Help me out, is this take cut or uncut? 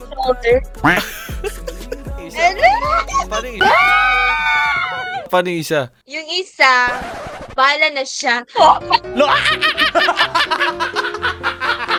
uncut